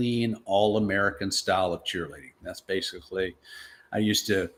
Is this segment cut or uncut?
uncut